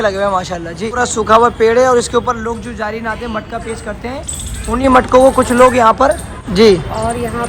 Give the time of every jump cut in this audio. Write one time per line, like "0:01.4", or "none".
0:00.8
0:06.3